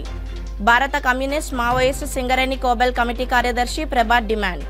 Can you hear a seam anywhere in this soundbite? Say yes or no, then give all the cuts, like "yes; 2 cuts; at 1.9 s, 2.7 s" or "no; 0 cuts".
no; 0 cuts